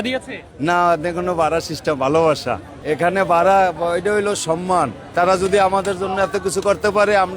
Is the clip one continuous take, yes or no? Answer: no